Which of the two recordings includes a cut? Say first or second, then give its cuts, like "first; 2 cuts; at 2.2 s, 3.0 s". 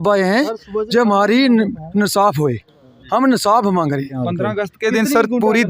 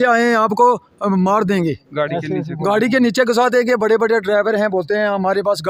first; 1 cut; at 4.1 s